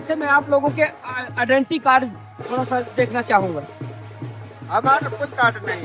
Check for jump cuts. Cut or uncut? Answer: uncut